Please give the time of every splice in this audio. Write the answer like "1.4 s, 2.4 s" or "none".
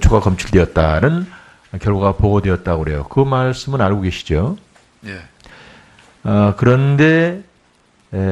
4.0 s